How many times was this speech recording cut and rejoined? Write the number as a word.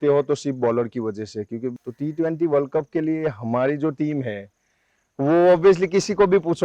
one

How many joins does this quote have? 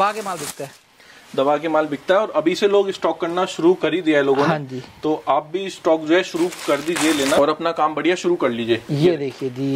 one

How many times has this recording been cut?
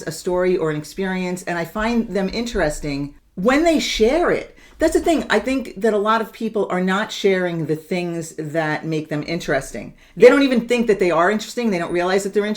one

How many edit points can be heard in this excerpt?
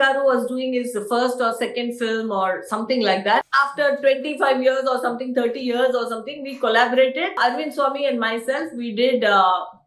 two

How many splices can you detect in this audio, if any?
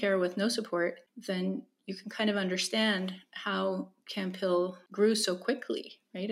two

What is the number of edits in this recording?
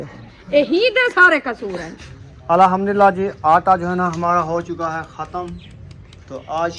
one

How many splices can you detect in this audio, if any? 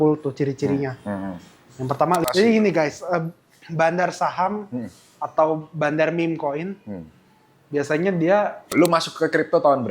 two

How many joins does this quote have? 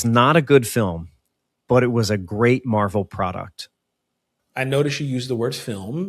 one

